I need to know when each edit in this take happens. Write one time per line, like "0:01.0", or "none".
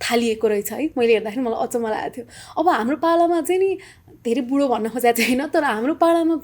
none

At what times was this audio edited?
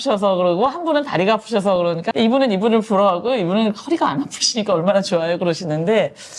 0:02.1

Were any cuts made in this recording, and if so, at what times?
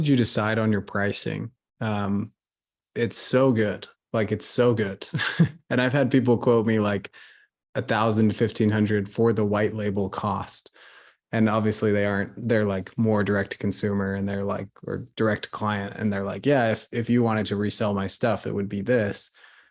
none

